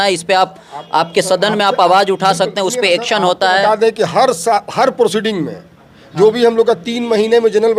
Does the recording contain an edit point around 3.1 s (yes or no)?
no